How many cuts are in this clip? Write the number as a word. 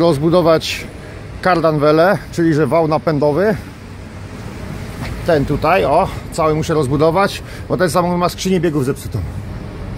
one